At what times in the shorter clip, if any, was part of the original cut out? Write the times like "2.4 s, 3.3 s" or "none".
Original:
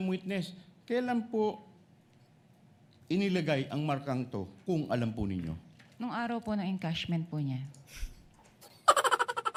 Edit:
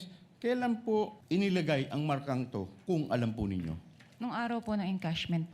1.2 s